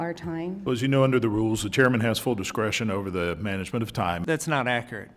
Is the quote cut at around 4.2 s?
yes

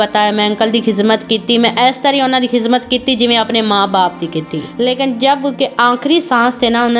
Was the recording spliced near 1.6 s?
no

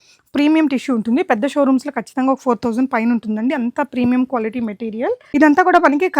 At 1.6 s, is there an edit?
no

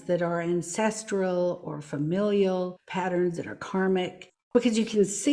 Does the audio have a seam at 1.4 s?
no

